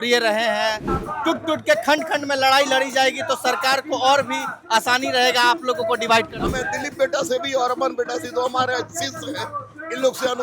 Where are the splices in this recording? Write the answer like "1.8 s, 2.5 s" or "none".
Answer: 0.9 s, 6.5 s